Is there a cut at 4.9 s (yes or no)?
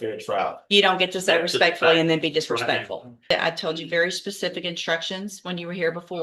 no